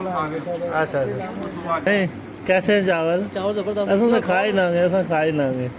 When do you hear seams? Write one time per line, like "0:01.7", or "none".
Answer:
0:01.9